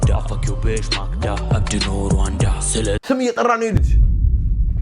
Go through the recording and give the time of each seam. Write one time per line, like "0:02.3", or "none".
0:03.8

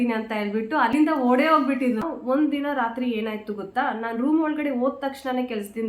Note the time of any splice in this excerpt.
0:00.9
0:02.1

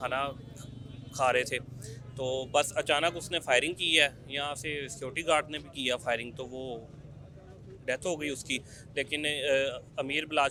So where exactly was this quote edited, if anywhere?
none

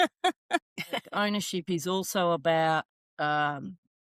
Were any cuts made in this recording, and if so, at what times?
0:01.1

